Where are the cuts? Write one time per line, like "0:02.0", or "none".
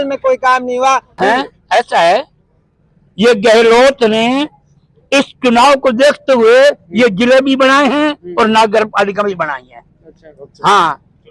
0:01.1